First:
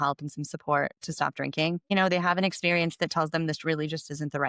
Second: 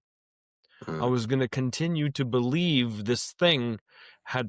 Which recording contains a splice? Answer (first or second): first